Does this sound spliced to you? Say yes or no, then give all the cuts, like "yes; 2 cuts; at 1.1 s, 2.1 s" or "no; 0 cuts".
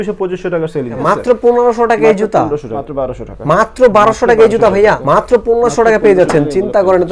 yes; 3 cuts; at 1.0 s, 2.7 s, 5.0 s